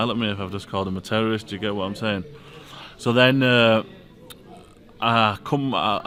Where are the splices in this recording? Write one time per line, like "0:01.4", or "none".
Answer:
none